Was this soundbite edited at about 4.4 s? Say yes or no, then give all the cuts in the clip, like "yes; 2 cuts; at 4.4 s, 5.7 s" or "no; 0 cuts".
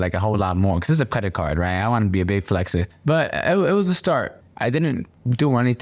yes; 2 cuts; at 2.9 s, 4.4 s